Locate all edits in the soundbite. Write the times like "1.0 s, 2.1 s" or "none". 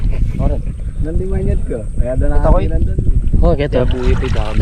none